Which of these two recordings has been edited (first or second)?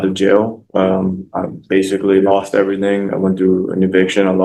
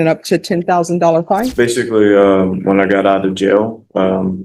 second